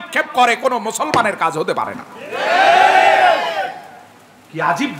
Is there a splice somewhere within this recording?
no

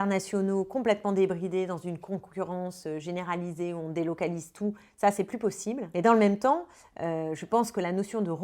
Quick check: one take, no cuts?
no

